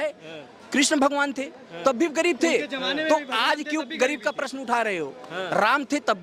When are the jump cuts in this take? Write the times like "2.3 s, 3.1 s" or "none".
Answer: none